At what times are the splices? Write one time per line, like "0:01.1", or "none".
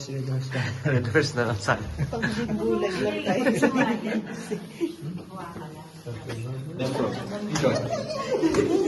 0:06.8